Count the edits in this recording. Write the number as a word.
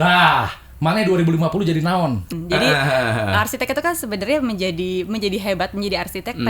one